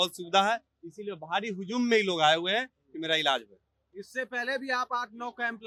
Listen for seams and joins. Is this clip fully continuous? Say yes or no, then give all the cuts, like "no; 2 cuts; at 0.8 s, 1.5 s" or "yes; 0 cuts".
yes; 0 cuts